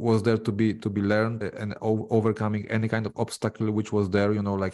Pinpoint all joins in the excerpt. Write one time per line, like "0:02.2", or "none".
0:01.4